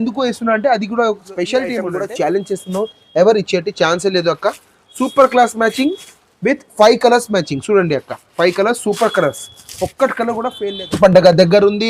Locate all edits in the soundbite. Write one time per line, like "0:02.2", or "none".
0:01.9
0:10.6